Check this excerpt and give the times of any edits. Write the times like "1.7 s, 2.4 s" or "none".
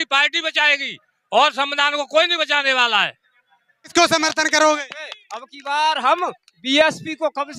3.8 s